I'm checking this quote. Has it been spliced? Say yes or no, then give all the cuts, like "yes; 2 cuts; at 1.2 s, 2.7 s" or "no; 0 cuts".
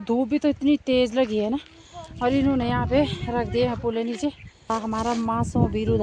yes; 1 cut; at 4.7 s